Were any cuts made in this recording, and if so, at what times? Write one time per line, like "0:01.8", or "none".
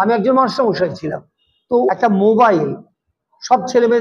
0:01.9